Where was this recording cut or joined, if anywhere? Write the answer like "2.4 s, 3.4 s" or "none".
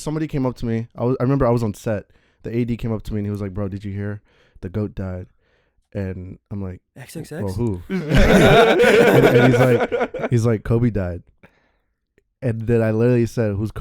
none